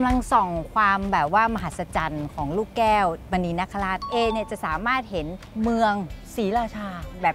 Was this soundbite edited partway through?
yes; 3 cuts; at 4.1 s, 5.4 s, 6.2 s

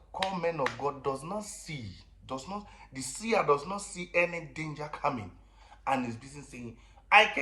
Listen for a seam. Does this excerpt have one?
no; 0 cuts

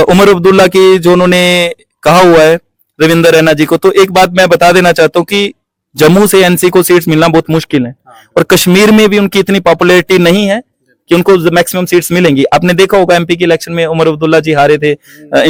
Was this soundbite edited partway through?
no; 0 cuts

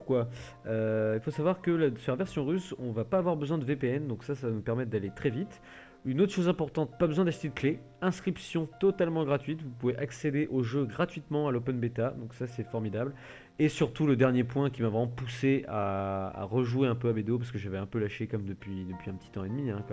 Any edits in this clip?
no; 0 cuts

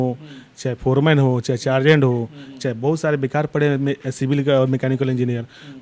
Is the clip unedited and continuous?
yes; 0 cuts

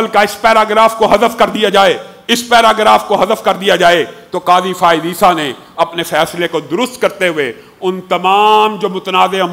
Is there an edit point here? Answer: no; 0 cuts

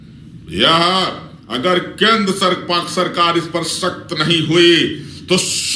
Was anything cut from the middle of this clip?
no; 0 cuts

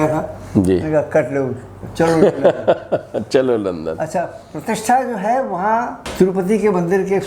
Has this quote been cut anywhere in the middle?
yes; 2 cuts; at 4.0 s, 6.0 s

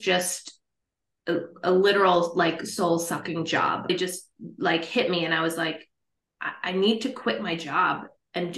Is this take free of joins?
no; 1 cut; at 3.9 s

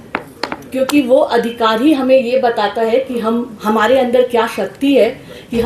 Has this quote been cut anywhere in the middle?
no; 0 cuts

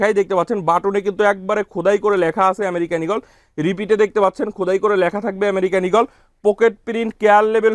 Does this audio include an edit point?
no; 0 cuts

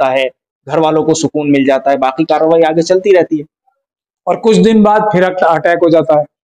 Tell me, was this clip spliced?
no; 0 cuts

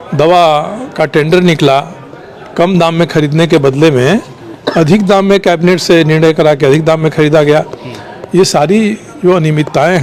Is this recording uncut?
yes; 0 cuts

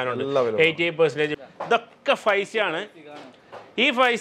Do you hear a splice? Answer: yes; 1 cut; at 1.3 s

